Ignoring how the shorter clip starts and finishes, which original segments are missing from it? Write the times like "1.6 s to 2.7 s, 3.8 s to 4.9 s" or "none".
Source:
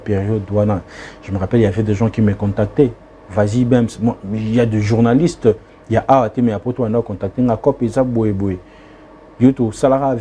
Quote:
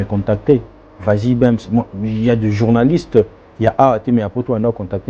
none